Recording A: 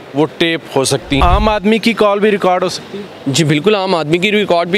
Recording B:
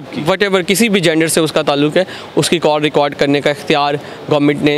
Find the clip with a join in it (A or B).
A